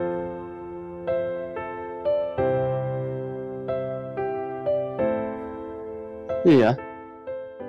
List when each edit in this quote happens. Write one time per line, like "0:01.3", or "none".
none